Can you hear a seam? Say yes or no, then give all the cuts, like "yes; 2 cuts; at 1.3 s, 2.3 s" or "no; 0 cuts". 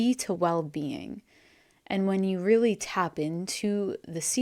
no; 0 cuts